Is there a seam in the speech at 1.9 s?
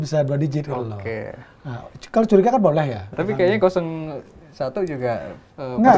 no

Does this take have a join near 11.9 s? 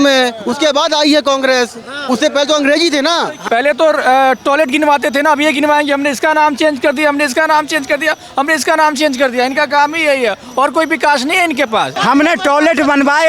yes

